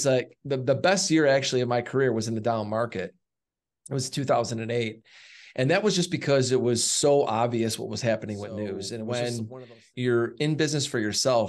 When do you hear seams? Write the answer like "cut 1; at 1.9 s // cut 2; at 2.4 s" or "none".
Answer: cut 1; at 9.0 s